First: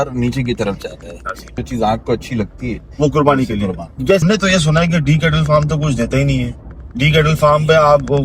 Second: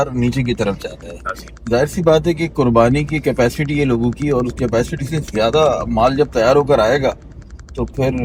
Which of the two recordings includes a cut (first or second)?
first